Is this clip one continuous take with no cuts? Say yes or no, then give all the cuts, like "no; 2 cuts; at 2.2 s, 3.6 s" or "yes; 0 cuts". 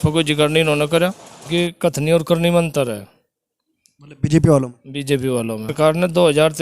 no; 2 cuts; at 1.3 s, 5.7 s